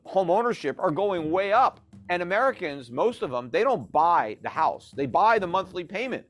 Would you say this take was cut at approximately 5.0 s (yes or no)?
no